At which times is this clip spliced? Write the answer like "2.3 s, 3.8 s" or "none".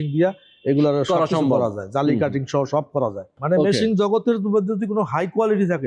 3.3 s